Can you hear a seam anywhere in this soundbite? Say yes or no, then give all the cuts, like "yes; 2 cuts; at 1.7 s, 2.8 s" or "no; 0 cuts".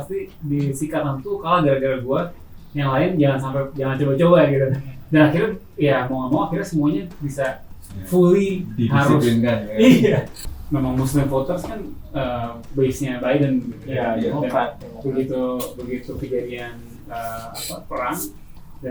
yes; 1 cut; at 10.3 s